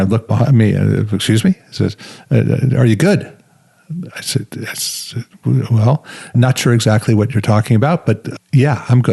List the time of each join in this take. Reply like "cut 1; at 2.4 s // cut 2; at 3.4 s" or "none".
cut 1; at 6.4 s // cut 2; at 8.3 s

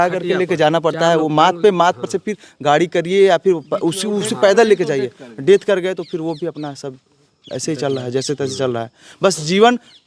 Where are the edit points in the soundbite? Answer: none

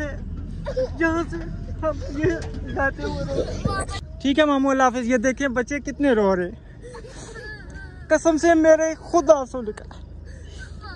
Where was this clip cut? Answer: cut 1; at 4.0 s

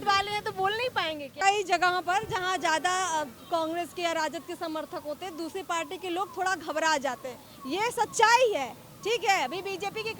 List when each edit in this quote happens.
cut 1; at 1.4 s

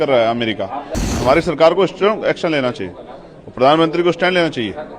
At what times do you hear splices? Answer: cut 1; at 1.1 s

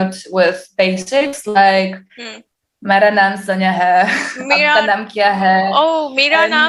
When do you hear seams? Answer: none

